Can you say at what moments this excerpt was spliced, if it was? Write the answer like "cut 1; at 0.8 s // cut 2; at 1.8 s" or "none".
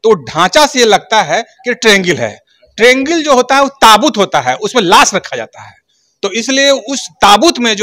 none